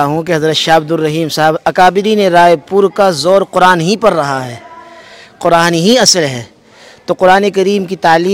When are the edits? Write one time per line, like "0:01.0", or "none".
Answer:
none